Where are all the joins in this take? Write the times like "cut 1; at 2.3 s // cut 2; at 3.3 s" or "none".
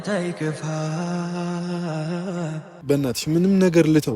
cut 1; at 2.7 s